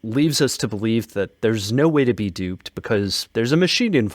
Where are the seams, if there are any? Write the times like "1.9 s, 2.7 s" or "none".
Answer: 1.1 s